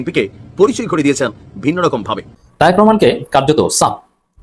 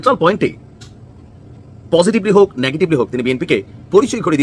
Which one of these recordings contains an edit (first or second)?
first